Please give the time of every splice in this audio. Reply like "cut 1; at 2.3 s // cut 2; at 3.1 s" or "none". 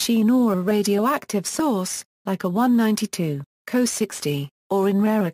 cut 1; at 1.9 s